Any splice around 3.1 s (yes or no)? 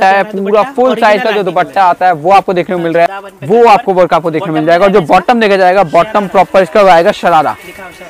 yes